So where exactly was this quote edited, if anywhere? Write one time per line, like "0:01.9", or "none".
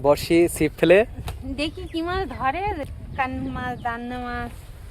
0:02.9